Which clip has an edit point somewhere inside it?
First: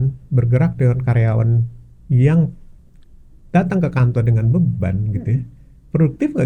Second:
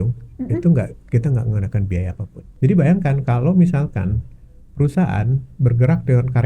second; 1 cut; at 2.4 s

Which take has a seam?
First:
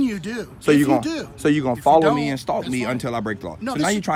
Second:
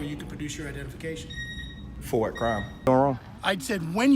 second; 1 cut; at 2.9 s

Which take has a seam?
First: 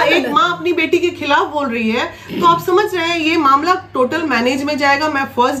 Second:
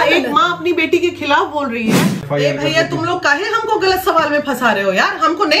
second; 1 cut; at 2.3 s

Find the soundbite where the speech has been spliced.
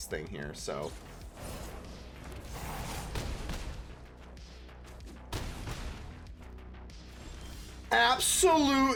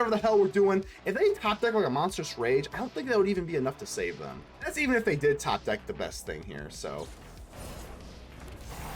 second; 1 cut; at 4.7 s

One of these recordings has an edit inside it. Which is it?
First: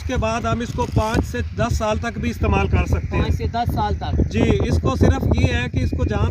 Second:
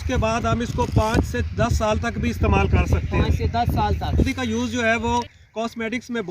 second; 1 cut; at 4.3 s

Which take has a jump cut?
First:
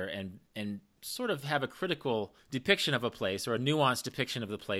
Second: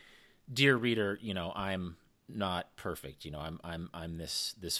first; 2 cuts; at 1.0 s, 2.4 s

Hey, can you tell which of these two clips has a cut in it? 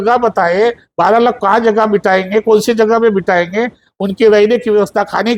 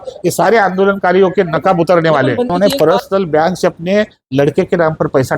second; 1 cut; at 2.5 s

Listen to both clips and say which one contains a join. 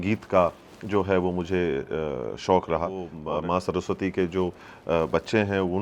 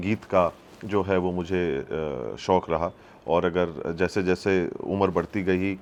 first; 1 cut; at 3.1 s

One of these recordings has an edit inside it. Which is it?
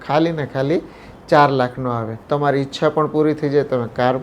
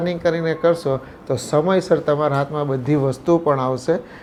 first; 1 cut; at 2.1 s

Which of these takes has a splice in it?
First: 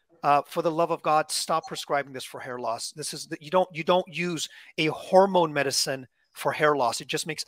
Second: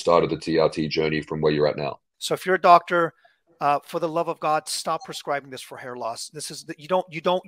second; 1 cut; at 2.1 s

